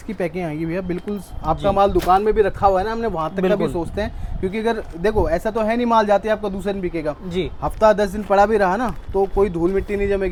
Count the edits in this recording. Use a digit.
0